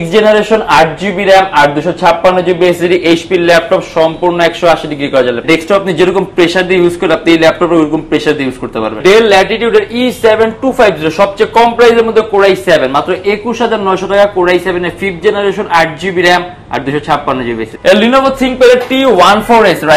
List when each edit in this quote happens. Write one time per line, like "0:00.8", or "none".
0:05.4
0:09.0
0:17.6